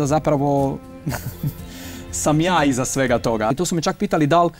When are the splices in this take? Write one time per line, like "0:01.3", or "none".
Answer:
0:03.5